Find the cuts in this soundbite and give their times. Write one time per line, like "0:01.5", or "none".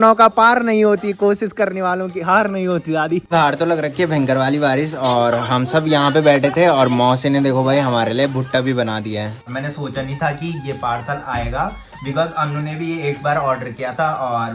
0:03.3
0:09.4